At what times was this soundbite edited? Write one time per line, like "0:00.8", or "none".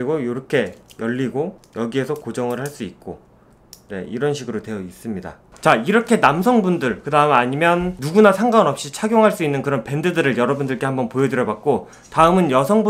none